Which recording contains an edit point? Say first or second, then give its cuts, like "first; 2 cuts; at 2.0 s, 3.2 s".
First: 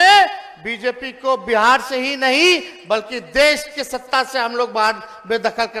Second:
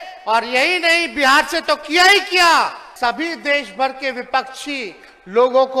second; 1 cut; at 2.8 s